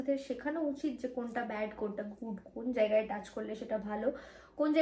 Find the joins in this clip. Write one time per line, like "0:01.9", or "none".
none